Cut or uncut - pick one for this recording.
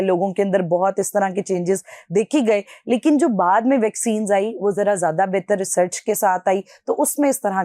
uncut